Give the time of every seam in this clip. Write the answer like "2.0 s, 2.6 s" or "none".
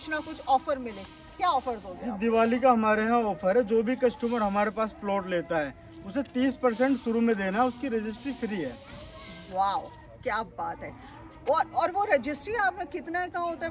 none